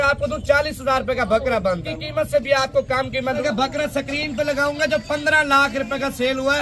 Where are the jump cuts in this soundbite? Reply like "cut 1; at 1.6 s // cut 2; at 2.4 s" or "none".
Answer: cut 1; at 1.9 s // cut 2; at 3.4 s

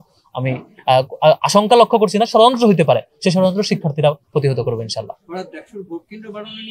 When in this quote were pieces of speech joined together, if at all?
none

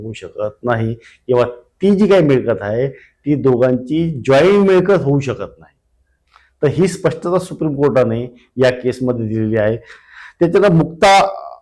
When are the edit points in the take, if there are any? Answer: none

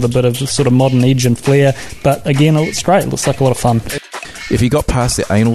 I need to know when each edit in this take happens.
cut 1; at 4.1 s

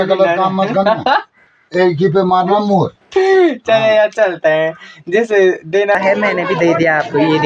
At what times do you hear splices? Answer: cut 1; at 5.9 s

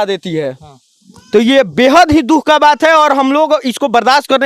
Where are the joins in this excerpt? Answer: none

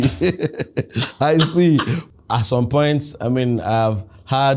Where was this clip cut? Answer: cut 1; at 2.0 s

